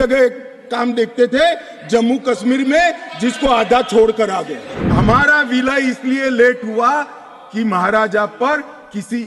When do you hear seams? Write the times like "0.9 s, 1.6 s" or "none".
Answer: 4.7 s